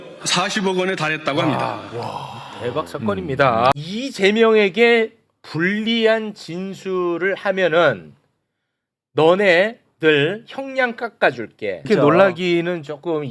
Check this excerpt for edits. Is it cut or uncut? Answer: cut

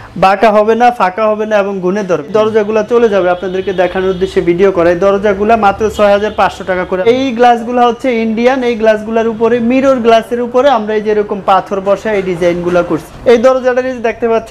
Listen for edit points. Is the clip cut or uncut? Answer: cut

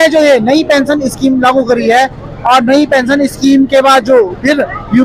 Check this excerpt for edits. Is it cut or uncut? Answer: uncut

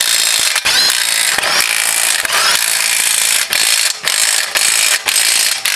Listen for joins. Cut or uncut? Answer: uncut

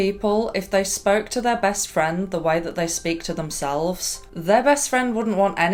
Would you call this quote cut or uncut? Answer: uncut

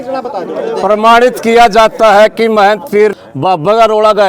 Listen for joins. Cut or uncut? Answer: cut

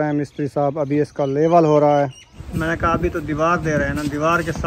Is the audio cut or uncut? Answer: cut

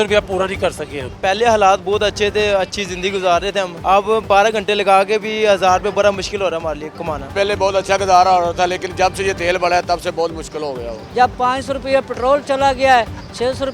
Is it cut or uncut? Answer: cut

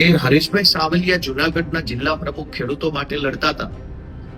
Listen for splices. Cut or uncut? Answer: uncut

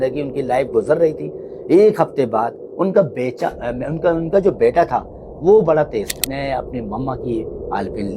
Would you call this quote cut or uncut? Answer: cut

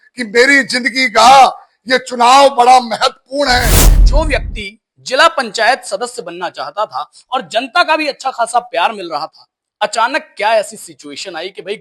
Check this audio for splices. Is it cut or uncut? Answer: cut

